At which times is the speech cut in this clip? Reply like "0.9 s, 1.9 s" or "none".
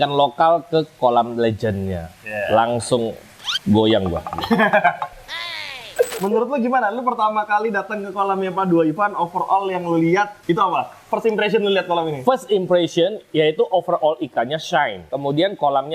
6.1 s, 10.4 s, 15.1 s